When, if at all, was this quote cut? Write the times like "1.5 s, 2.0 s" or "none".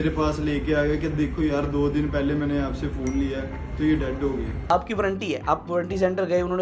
4.7 s

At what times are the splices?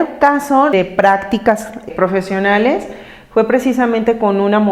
0.7 s, 1.9 s

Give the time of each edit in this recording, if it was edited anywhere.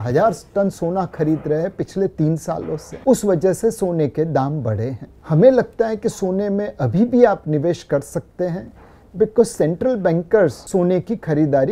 none

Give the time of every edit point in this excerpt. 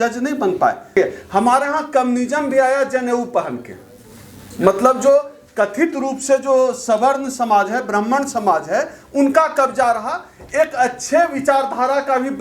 1.0 s

